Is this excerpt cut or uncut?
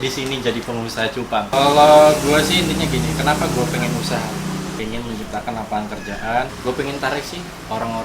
cut